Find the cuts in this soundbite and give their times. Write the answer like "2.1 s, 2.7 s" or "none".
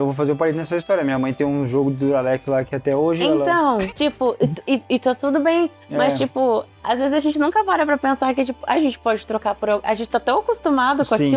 none